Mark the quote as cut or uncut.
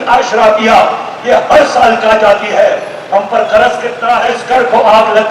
cut